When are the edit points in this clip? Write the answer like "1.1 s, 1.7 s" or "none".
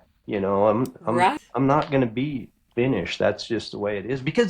1.2 s